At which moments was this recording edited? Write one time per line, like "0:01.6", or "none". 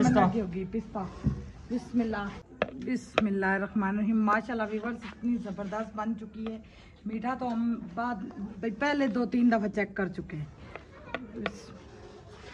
0:02.5